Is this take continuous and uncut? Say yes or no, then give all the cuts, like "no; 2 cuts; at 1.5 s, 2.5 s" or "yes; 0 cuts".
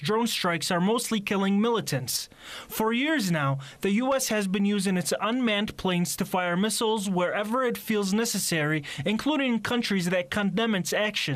yes; 0 cuts